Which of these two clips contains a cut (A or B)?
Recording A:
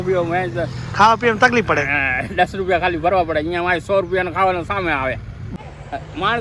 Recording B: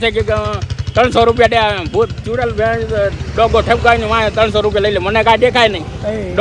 A